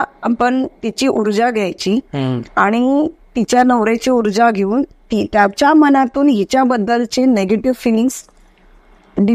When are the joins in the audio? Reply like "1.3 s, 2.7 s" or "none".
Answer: none

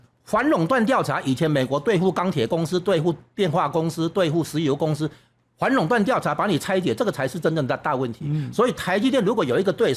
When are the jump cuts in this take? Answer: none

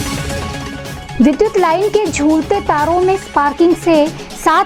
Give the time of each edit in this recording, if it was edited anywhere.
none

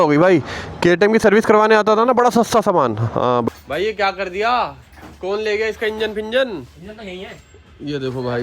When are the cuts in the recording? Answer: 3.5 s

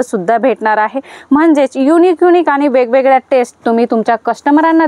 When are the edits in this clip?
none

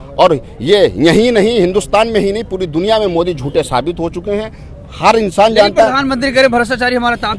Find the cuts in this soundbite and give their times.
none

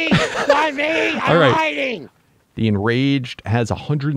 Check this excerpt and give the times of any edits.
2.0 s

